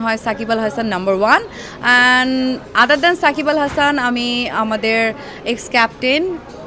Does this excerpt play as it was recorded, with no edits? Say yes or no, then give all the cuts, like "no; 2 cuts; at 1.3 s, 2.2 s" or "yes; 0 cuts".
yes; 0 cuts